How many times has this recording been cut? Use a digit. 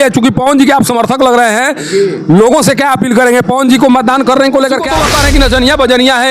1